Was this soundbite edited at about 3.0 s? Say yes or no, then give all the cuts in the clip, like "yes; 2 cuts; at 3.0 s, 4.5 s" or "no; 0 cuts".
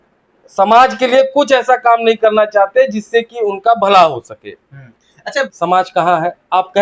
no; 1 cut; at 5.5 s